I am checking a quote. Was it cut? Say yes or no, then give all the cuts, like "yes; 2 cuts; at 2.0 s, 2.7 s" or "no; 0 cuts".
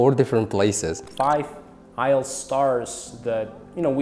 yes; 1 cut; at 1.0 s